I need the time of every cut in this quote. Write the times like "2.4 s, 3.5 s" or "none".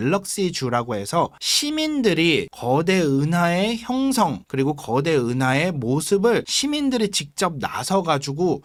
none